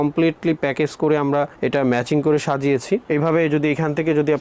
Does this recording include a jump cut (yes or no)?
no